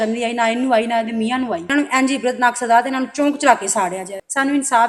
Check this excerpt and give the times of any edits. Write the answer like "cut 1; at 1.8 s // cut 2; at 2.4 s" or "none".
none